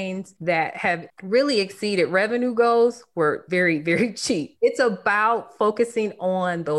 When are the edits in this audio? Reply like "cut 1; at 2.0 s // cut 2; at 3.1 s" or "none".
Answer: cut 1; at 3.4 s // cut 2; at 4.5 s

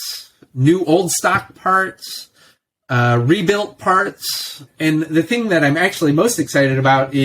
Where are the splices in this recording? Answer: none

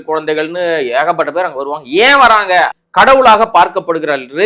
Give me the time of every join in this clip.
cut 1; at 2.8 s

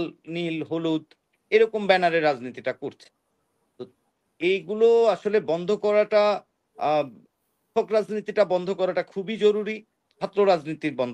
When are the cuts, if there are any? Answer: none

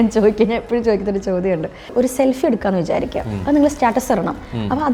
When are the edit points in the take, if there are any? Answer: cut 1; at 1.9 s

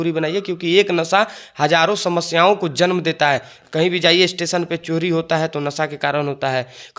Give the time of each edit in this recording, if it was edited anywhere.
none

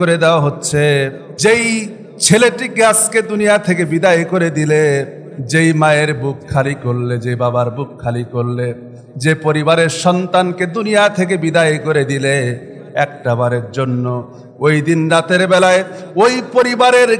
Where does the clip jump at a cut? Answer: cut 1; at 1.2 s

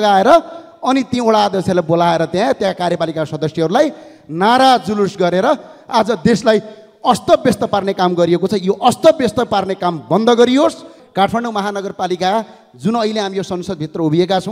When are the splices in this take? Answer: cut 1; at 11.0 s

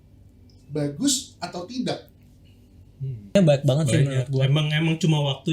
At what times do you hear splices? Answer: cut 1; at 3.3 s

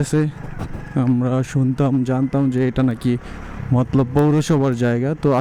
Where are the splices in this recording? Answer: none

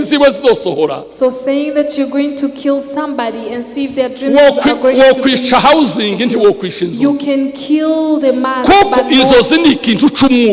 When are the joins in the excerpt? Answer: none

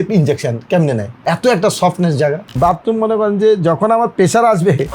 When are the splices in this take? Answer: cut 1; at 2.5 s

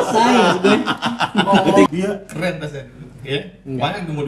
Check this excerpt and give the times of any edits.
cut 1; at 1.9 s

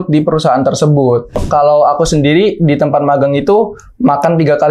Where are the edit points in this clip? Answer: cut 1; at 1.4 s

